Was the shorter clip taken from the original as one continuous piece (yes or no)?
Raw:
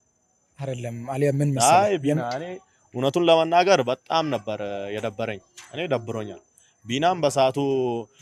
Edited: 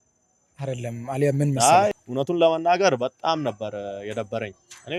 no